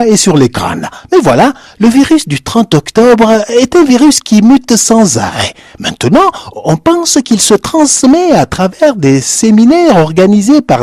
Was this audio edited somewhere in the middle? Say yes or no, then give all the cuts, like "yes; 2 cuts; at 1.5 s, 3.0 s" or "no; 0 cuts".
no; 0 cuts